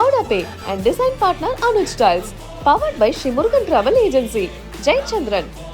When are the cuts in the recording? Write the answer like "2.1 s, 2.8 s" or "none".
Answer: none